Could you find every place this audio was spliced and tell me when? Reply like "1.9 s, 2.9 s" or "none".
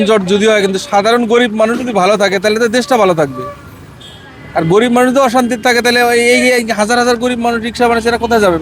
none

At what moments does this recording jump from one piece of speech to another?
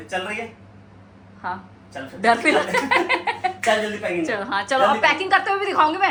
none

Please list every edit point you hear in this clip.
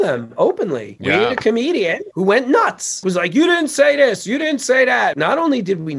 0.9 s, 2.0 s, 3.0 s, 5.1 s

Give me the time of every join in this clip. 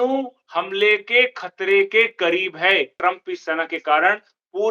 2.9 s

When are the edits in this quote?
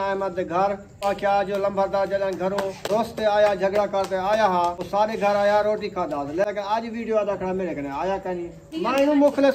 1.1 s, 2.8 s, 4.8 s, 6.4 s, 8.7 s

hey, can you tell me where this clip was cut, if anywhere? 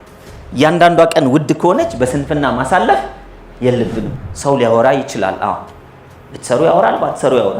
4.1 s

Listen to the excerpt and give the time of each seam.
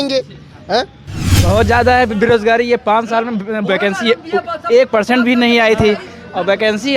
1.3 s

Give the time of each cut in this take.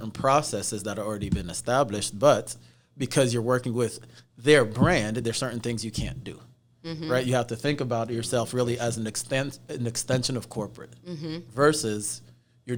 none

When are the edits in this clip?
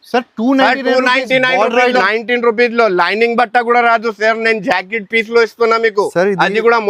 2.0 s

